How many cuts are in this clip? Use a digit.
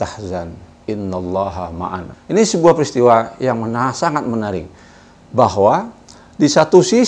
1